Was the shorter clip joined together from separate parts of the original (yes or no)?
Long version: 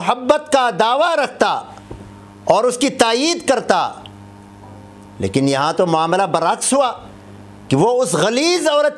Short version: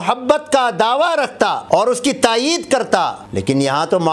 yes